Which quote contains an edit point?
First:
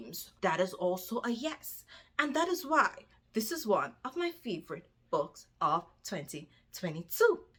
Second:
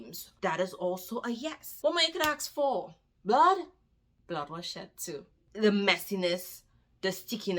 second; 2 cuts; at 1.8 s, 5.4 s

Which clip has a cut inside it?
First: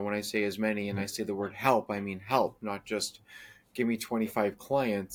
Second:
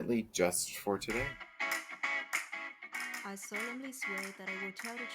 second; 1 cut; at 1.4 s

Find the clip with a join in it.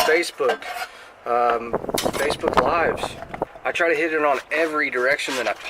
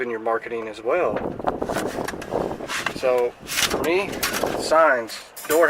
first; 1 cut; at 3.6 s

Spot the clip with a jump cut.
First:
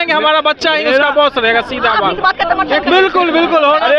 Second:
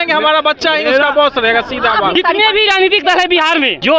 second; 1 cut; at 2.1 s

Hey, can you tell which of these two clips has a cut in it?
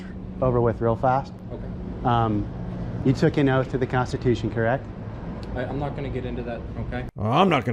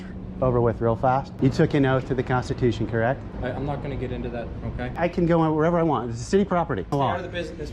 second; 4 cuts; at 1.3 s, 3.3 s, 5.0 s, 6.9 s

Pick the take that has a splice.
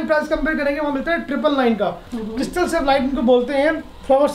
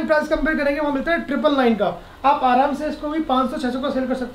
first; 1 cut; at 2.1 s

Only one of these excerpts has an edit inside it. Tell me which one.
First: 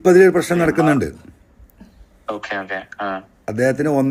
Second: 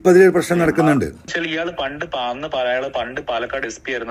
second; 1 cut; at 1.3 s

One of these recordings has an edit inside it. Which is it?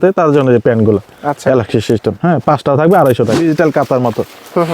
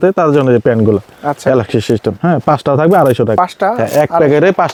first; 1 cut; at 3.4 s

